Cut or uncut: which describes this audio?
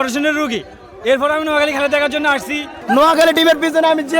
cut